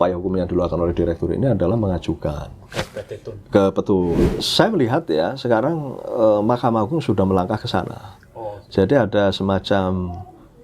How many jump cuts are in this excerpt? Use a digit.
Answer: 1